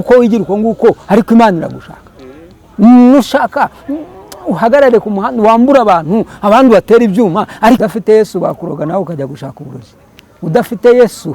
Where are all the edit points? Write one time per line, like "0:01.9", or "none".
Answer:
0:07.8